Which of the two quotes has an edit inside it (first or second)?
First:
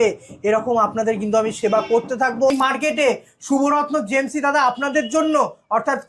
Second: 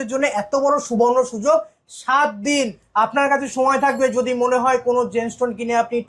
first